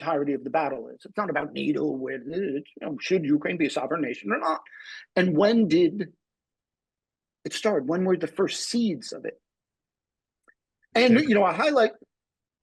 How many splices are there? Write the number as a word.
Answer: zero